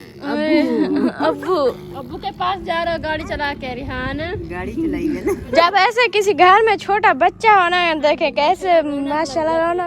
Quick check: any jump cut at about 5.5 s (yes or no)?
yes